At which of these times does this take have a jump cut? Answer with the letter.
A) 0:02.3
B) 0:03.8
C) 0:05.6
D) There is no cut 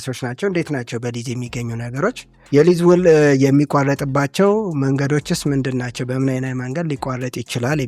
A